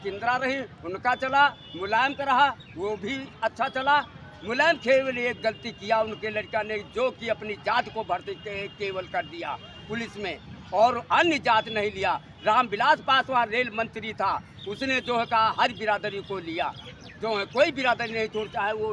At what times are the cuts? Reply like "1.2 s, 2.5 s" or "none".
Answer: none